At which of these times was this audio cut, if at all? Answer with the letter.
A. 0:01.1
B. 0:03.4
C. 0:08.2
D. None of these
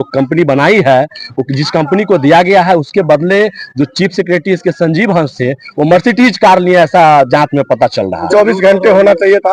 C